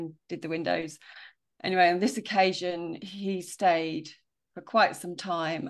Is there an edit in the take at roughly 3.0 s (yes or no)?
yes